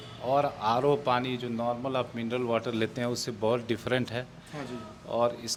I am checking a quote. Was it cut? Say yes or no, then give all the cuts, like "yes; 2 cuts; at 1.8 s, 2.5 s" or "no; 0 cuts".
no; 0 cuts